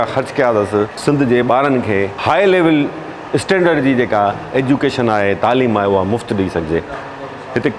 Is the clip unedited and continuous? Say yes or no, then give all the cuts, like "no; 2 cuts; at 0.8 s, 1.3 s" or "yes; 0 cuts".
yes; 0 cuts